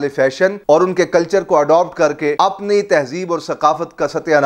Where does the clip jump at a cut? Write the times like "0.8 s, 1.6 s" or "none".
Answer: 2.3 s